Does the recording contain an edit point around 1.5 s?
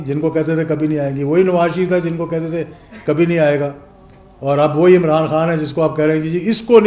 no; 0 cuts

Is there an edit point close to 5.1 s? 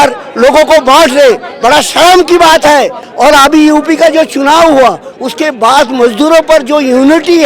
no; 1 cut; at 3.0 s

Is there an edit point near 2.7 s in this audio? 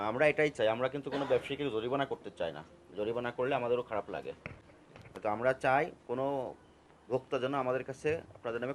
no; 0 cuts

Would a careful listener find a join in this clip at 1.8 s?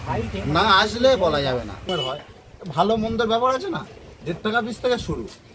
yes; 1 cut; at 1.8 s

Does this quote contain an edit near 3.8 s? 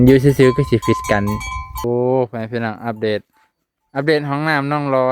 no; 1 cut; at 1.8 s

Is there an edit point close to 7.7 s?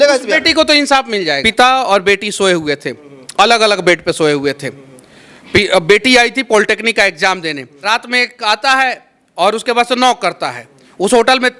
yes; 2 cuts; at 1.4 s, 7.7 s

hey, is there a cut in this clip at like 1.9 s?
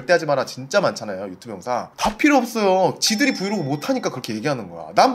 no; 0 cuts

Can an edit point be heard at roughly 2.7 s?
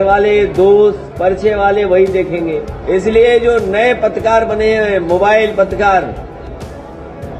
yes; 1 cut; at 2.7 s

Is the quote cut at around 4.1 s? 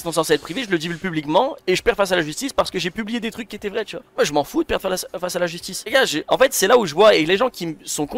no; 0 cuts

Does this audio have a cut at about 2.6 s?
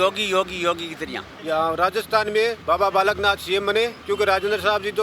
yes; 3 cuts; at 1.3 s, 2.6 s, 4.0 s

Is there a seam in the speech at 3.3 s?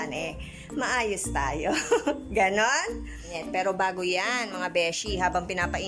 yes; 1 cut; at 3.3 s

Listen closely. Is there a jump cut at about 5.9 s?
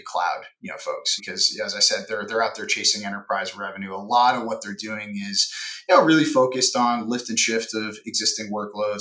no; 1 cut; at 1.1 s

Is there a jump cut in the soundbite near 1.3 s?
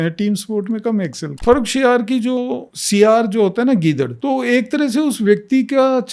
yes; 3 cuts; at 1.3 s, 2.4 s, 4.1 s

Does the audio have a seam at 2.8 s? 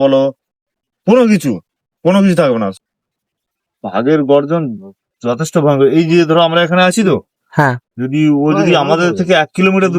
yes; 1 cut; at 2.8 s

